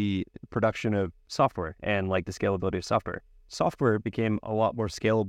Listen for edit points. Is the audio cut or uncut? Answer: cut